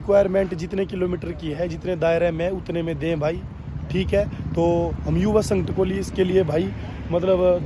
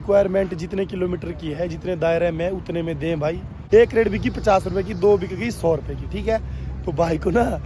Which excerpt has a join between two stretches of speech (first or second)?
second